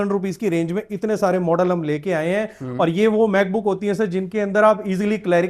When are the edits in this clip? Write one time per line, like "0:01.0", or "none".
none